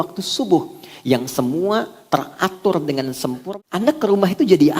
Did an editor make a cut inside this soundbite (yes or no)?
yes